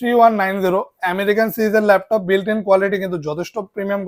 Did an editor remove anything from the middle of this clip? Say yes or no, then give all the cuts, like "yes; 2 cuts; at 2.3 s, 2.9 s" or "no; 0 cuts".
no; 0 cuts